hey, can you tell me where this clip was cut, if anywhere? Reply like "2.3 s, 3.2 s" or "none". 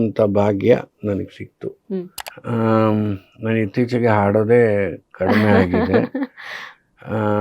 2.2 s